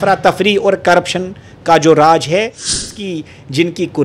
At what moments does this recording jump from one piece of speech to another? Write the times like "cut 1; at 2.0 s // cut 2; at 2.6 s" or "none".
cut 1; at 2.8 s